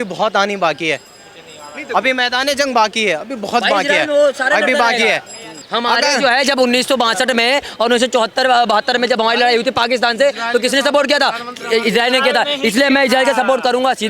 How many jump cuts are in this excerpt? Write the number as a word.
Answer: one